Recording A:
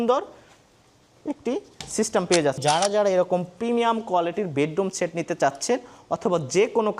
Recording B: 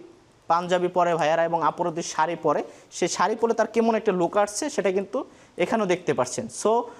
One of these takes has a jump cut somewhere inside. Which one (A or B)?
A